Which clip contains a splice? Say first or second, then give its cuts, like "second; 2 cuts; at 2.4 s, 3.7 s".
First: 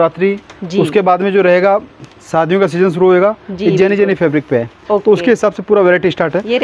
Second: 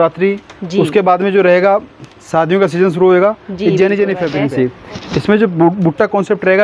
second; 1 cut; at 4.3 s